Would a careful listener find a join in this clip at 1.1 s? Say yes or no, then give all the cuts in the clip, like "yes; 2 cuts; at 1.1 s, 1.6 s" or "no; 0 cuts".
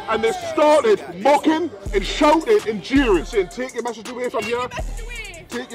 no; 1 cut; at 3.2 s